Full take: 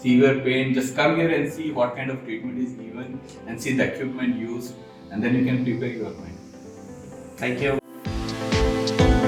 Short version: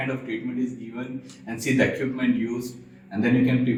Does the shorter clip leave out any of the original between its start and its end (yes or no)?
no